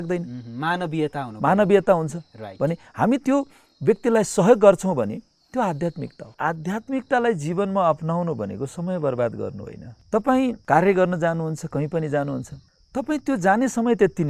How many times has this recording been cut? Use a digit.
1